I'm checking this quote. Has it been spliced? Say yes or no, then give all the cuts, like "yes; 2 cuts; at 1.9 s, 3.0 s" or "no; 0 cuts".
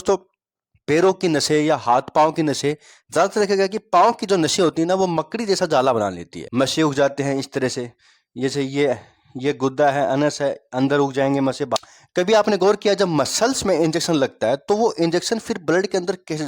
yes; 2 cuts; at 6.4 s, 11.8 s